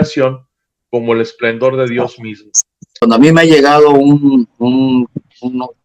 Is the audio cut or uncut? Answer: cut